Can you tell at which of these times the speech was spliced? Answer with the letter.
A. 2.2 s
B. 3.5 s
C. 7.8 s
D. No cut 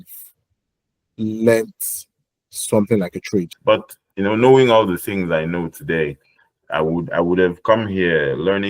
B